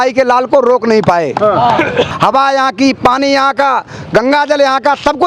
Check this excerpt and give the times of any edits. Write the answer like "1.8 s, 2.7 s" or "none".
2.1 s

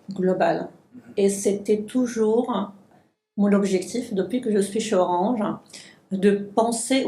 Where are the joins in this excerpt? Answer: 2.9 s

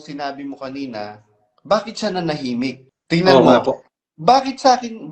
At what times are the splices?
2.9 s

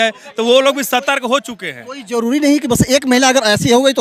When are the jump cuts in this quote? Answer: none

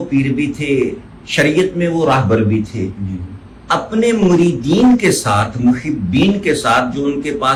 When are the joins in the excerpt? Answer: none

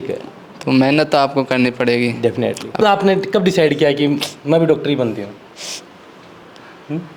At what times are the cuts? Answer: 2.8 s

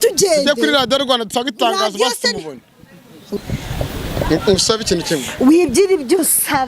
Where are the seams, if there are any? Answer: 3.3 s

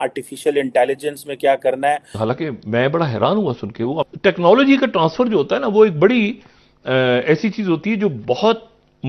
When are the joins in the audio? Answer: 2.2 s, 4.0 s

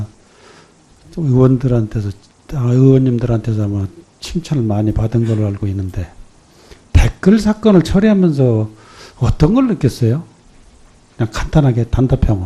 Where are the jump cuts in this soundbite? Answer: none

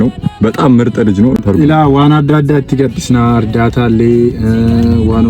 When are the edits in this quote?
1.4 s

